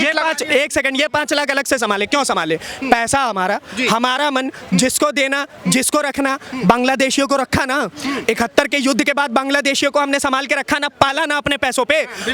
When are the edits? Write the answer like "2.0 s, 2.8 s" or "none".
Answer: none

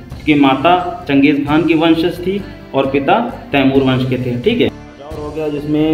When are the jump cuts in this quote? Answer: 5.0 s

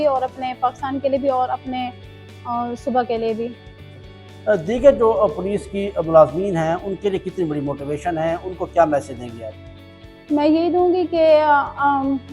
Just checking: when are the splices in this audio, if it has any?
none

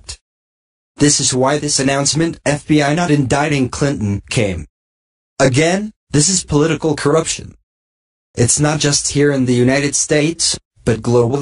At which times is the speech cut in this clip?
4.7 s

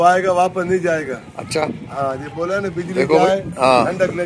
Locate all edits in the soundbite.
none

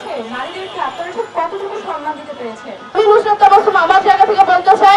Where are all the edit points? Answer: 2.9 s

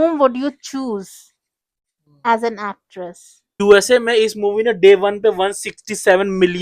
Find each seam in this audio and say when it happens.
3.6 s

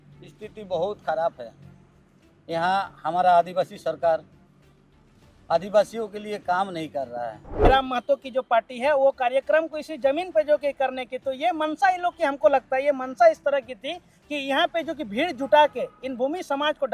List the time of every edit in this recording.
7.7 s

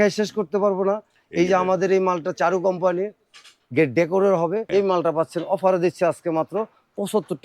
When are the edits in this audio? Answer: 4.7 s

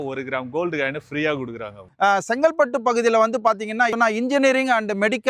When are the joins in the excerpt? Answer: 1.9 s, 3.9 s

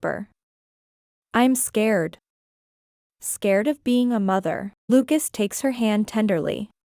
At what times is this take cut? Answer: 4.9 s

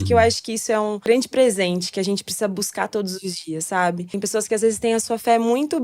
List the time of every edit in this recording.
1.1 s, 4.1 s

